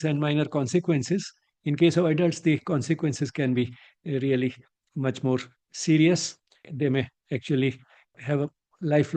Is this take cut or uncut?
cut